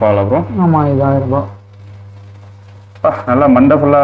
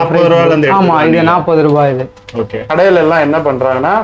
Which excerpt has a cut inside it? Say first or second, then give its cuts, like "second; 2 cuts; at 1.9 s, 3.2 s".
second; 1 cut; at 2.7 s